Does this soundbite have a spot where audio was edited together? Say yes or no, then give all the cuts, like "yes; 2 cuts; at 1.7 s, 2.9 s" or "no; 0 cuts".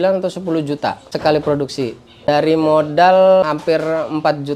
yes; 3 cuts; at 1.0 s, 2.3 s, 3.4 s